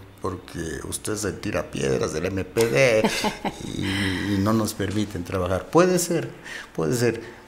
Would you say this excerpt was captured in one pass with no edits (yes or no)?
yes